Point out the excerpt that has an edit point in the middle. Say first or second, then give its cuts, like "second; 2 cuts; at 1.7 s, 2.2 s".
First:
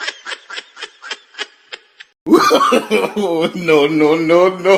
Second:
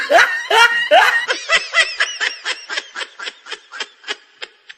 second; 1 cut; at 1.2 s